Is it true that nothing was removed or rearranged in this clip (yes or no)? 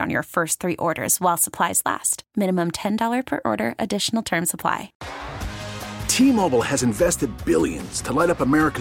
no